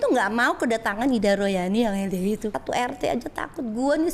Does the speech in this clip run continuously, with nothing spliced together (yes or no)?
no